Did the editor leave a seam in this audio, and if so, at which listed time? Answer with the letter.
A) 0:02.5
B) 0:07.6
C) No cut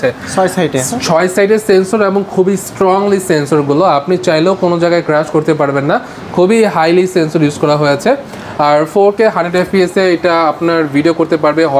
C